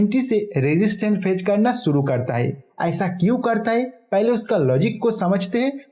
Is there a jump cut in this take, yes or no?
no